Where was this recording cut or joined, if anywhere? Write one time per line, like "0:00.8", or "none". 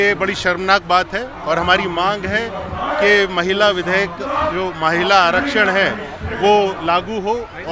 none